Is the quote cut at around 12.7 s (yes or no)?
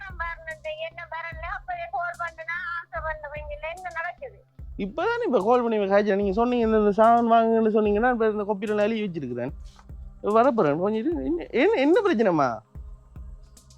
yes